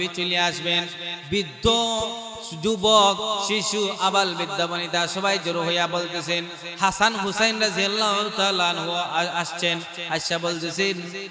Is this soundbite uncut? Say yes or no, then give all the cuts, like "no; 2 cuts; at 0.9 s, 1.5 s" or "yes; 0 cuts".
yes; 0 cuts